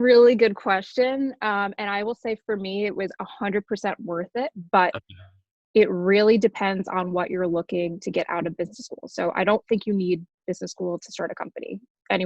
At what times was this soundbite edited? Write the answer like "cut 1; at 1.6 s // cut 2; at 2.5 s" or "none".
none